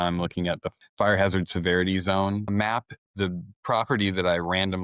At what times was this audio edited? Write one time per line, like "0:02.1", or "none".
0:01.0
0:02.6